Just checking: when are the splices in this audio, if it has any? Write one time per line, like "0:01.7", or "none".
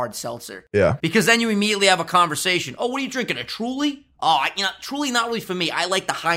0:01.0